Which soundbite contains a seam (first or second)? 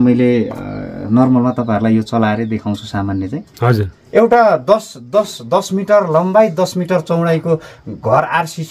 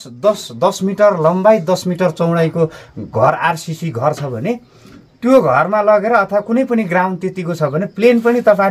first